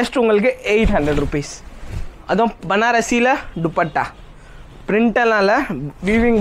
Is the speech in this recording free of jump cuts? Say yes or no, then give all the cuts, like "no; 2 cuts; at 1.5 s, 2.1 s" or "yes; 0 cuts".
yes; 0 cuts